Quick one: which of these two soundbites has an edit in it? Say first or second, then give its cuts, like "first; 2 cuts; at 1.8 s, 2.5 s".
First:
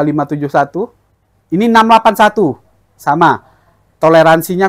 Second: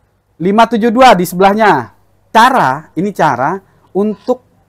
second; 1 cut; at 2.2 s